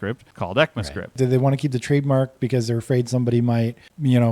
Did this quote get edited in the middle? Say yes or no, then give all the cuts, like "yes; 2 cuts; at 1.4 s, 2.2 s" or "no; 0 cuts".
yes; 1 cut; at 1.1 s